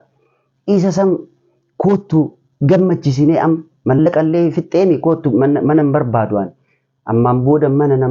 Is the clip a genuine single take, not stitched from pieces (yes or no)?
yes